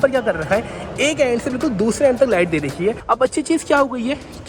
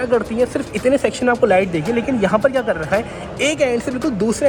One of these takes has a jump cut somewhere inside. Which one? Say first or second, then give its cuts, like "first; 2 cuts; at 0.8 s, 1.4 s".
first; 1 cut; at 3.0 s